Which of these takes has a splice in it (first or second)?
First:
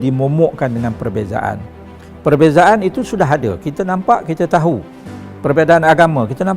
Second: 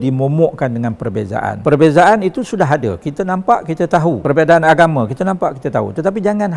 second